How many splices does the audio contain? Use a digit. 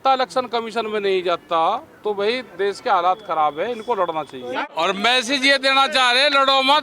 1